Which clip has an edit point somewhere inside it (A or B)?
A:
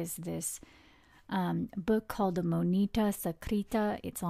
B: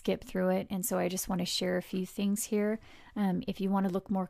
B